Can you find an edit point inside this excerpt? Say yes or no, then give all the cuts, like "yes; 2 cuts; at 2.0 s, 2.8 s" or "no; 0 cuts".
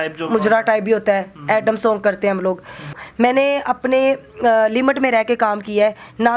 yes; 1 cut; at 3.0 s